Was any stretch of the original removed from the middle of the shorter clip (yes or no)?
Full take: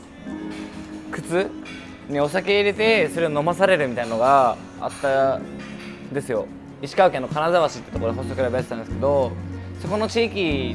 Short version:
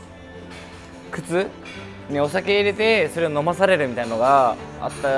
no